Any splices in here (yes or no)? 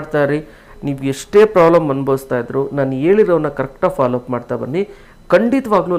no